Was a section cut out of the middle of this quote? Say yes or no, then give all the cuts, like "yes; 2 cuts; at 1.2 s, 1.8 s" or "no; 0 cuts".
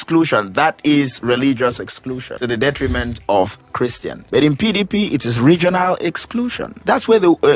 yes; 3 cuts; at 2.3 s, 4.1 s, 6.8 s